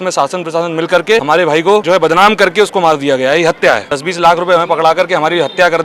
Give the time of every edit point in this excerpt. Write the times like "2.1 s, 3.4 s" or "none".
1.5 s, 3.9 s